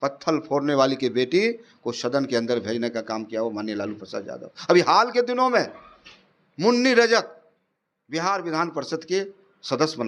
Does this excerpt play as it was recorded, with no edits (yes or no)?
yes